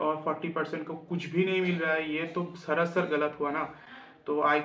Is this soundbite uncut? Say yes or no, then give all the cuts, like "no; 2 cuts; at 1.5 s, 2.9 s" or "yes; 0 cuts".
yes; 0 cuts